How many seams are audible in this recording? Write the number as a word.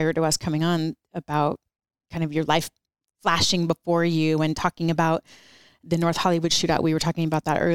zero